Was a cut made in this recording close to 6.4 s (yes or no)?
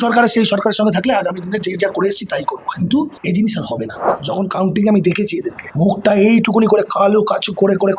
no